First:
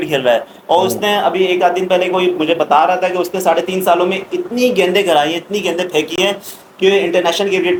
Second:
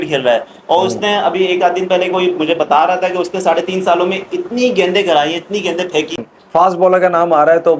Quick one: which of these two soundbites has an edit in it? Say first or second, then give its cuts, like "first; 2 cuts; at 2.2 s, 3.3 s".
second; 1 cut; at 6.2 s